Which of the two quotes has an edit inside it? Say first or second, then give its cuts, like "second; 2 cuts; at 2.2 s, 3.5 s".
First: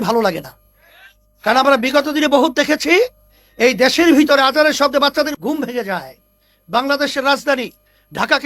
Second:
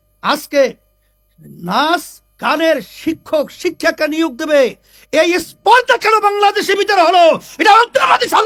first; 1 cut; at 5.3 s